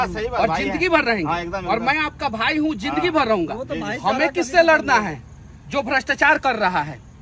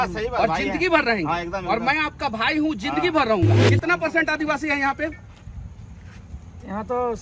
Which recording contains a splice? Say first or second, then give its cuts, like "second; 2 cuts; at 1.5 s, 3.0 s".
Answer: second; 1 cut; at 3.6 s